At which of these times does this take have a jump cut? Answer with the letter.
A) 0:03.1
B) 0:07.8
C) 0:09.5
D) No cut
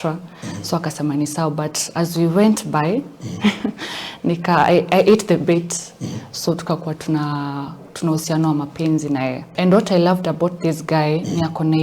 C